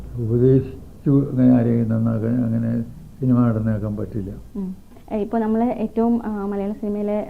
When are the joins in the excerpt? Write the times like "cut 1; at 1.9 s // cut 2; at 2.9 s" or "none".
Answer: none